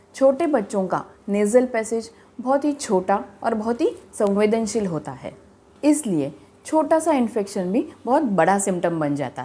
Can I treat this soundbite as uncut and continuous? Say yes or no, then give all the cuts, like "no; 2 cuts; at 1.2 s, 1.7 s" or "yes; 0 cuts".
yes; 0 cuts